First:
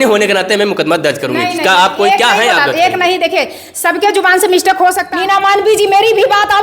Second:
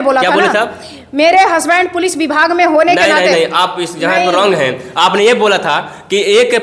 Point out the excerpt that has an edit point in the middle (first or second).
first